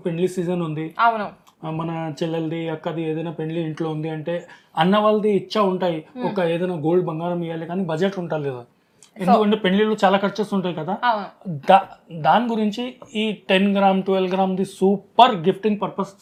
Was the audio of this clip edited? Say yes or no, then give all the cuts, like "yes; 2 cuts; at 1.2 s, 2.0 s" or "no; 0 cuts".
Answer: no; 0 cuts